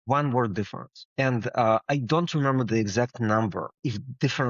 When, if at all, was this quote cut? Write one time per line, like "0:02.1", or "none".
none